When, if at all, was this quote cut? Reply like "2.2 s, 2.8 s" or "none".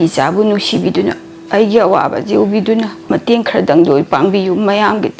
3.0 s